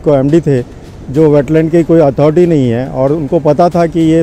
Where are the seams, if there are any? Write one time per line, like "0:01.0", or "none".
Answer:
none